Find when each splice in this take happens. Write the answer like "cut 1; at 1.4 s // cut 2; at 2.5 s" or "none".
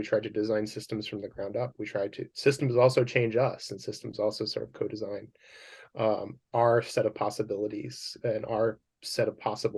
none